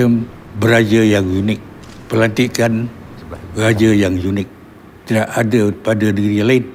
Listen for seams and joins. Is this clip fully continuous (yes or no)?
yes